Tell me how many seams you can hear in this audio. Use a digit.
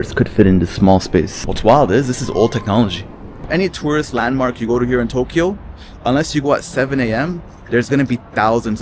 2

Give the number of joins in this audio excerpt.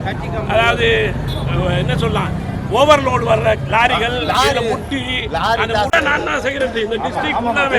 1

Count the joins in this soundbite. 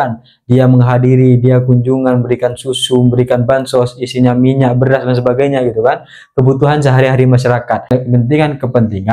1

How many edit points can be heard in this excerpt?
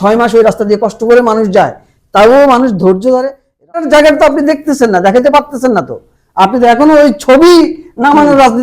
1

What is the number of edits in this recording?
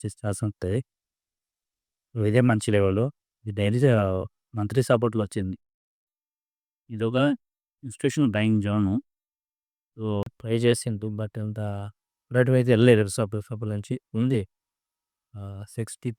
1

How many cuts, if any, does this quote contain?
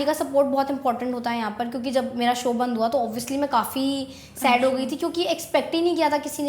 0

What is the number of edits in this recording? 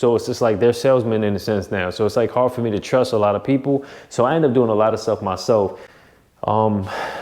1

